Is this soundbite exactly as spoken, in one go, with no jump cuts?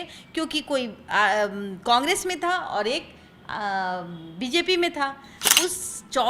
no; 1 cut; at 5.3 s

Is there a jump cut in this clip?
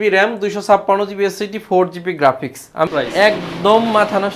yes; 1 cut; at 2.9 s

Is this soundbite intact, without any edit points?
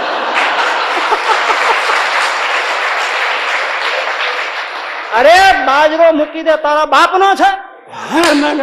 yes; 0 cuts

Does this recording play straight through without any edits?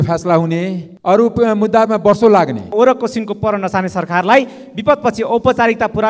no; 1 cut; at 2.7 s

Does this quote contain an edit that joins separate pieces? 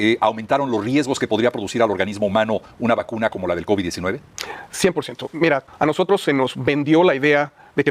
yes; 1 cut; at 5.7 s

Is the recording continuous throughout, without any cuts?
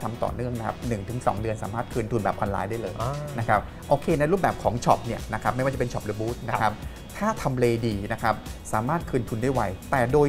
yes; 0 cuts

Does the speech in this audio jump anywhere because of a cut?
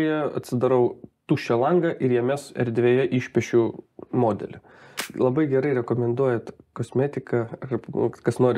yes; 1 cut; at 5.0 s

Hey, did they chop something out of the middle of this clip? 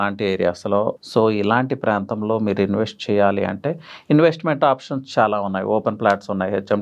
yes; 1 cut; at 1.0 s

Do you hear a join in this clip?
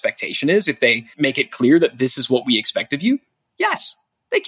yes; 1 cut; at 1.1 s

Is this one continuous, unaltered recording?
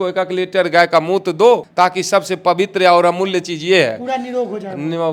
no; 1 cut; at 1.7 s

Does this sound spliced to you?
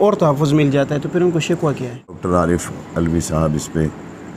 yes; 1 cut; at 2.1 s

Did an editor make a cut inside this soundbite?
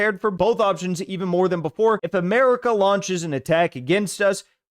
yes; 1 cut; at 2.0 s

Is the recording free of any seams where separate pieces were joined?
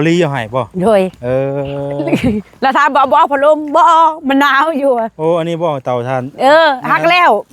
yes; 0 cuts

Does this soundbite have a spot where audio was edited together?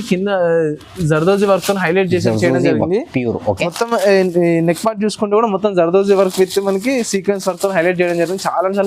no; 0 cuts

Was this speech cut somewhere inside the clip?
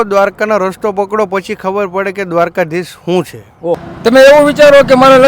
yes; 1 cut; at 3.9 s

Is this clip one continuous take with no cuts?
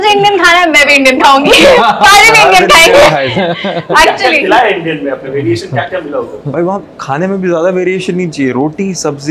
yes; 0 cuts

